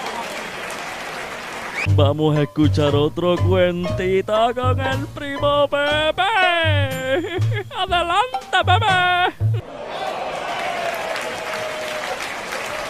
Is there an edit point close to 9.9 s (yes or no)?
no